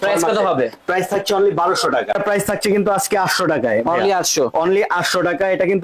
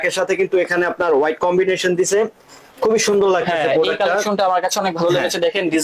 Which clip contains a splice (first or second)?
first